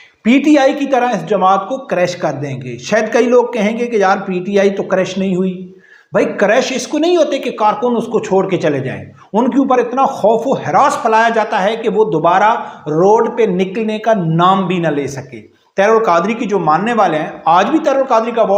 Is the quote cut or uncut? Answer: uncut